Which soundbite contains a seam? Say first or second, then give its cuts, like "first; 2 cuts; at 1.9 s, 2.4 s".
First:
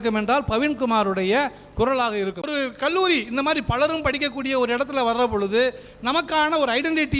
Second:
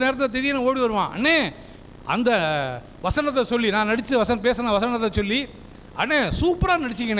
first; 1 cut; at 2.5 s